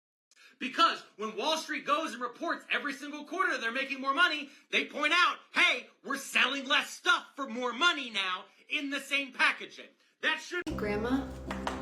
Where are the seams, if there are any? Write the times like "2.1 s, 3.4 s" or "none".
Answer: 10.7 s